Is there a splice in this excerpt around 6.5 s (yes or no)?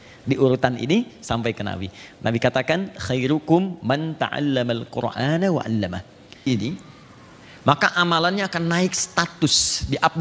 yes